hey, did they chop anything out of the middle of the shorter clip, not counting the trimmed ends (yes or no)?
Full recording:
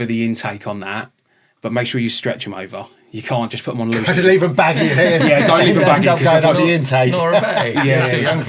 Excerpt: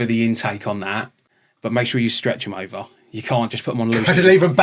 no